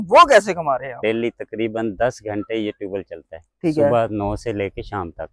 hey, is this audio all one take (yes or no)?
no